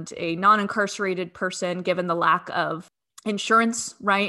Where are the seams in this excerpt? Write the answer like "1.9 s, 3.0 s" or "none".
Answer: 2.9 s